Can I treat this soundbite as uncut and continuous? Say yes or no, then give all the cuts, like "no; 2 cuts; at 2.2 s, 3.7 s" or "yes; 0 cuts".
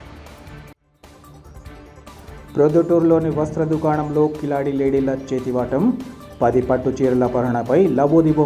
yes; 0 cuts